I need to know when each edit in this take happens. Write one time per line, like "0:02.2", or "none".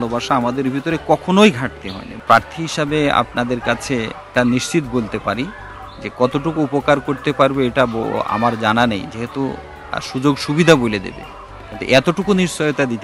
0:02.1
0:04.2